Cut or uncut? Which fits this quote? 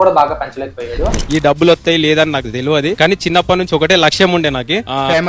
cut